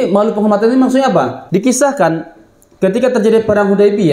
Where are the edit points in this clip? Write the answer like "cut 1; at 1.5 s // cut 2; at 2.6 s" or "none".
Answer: cut 1; at 1.4 s